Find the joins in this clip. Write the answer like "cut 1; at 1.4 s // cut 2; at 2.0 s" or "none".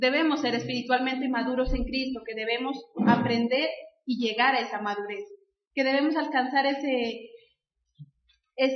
cut 1; at 3.8 s